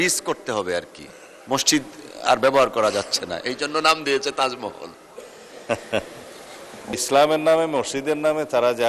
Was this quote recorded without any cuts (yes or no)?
no